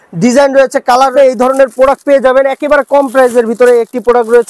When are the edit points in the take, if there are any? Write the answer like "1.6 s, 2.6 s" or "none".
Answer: 1.1 s